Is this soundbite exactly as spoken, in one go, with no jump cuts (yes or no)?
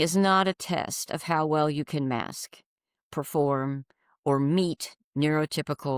yes